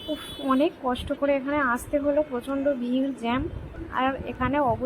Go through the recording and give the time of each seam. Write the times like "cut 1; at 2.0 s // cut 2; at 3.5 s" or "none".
cut 1; at 3.7 s

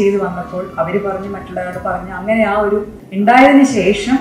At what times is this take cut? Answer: cut 1; at 3.0 s

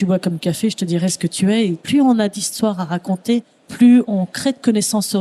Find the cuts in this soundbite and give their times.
cut 1; at 1.8 s // cut 2; at 4.1 s

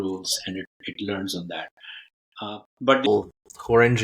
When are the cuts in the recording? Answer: cut 1; at 3.1 s

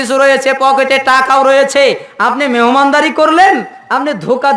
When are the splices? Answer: none

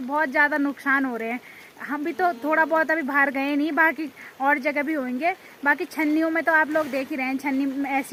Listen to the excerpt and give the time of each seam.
none

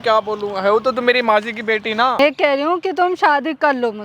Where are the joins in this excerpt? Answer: cut 1; at 2.2 s

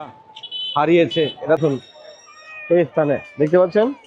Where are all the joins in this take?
cut 1; at 1.6 s

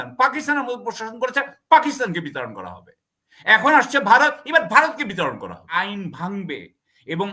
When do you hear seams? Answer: cut 1; at 5.7 s

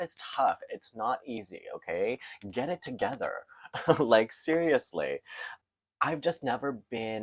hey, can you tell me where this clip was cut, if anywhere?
none

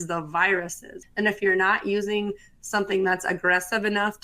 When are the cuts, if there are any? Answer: cut 1; at 1.0 s

